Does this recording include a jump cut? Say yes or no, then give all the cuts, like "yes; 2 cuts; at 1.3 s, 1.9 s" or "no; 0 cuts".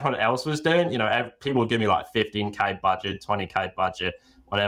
no; 0 cuts